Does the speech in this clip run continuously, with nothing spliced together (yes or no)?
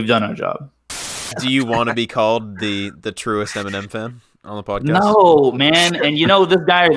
no